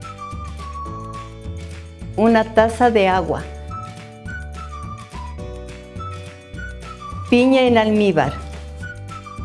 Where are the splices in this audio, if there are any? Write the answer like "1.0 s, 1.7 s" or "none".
1.6 s, 3.5 s, 6.7 s, 8.4 s